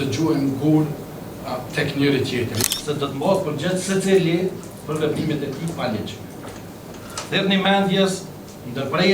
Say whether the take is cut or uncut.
cut